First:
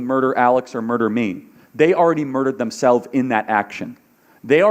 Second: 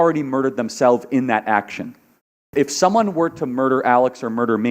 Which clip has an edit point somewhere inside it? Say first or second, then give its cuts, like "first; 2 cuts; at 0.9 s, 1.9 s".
second; 1 cut; at 2.4 s